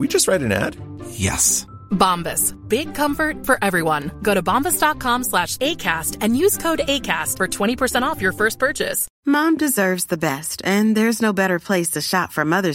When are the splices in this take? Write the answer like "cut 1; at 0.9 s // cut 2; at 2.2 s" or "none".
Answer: cut 1; at 9.1 s